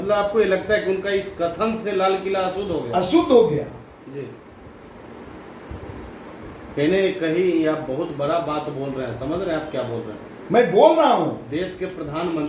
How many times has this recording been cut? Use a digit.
0